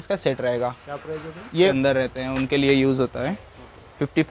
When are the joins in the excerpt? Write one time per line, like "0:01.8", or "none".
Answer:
0:01.7